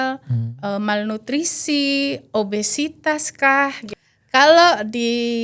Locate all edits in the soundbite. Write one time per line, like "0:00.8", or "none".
0:03.9